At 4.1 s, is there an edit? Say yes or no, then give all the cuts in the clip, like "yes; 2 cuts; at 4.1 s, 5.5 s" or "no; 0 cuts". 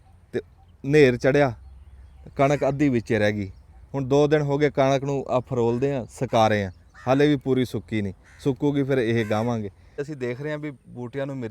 no; 1 cut; at 10.0 s